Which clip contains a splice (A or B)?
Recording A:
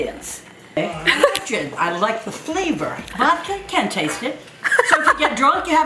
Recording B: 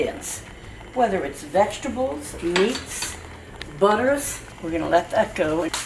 A